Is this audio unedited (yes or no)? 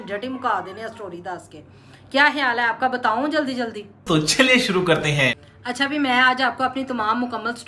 yes